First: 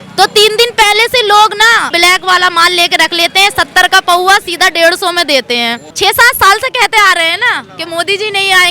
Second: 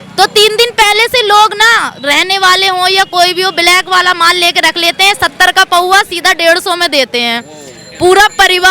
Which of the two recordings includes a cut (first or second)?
first